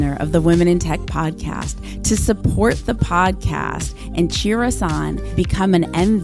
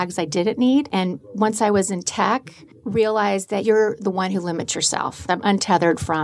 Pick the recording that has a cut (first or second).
second